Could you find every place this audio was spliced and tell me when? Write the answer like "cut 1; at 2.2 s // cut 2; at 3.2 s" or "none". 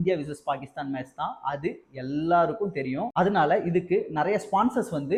none